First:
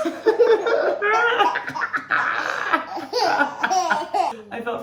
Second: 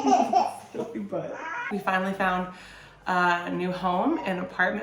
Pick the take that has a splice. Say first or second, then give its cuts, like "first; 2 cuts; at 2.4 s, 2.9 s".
second; 1 cut; at 1.7 s